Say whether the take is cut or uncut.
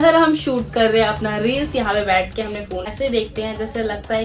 cut